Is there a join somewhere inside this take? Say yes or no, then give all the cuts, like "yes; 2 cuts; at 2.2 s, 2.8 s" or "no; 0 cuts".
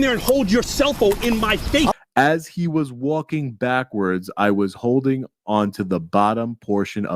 yes; 1 cut; at 1.9 s